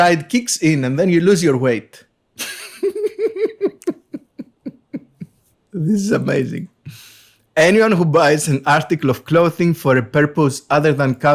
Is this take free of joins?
yes; 0 cuts

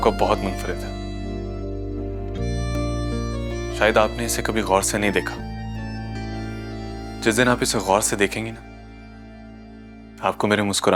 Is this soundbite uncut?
yes; 0 cuts

